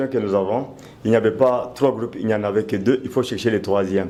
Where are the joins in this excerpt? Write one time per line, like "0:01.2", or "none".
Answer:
none